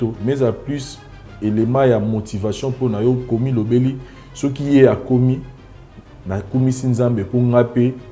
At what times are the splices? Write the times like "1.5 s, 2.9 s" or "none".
none